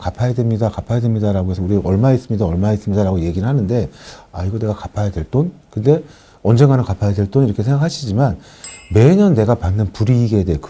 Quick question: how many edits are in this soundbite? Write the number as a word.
zero